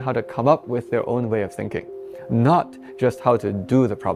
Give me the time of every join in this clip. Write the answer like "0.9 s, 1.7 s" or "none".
none